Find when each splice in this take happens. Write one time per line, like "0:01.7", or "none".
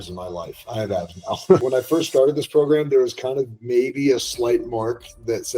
0:01.6